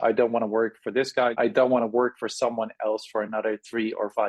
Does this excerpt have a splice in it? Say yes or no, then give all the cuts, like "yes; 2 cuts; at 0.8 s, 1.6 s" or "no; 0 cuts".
yes; 1 cut; at 1.3 s